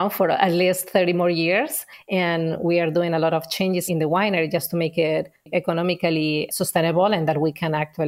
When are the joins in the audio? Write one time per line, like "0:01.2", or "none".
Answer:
0:05.4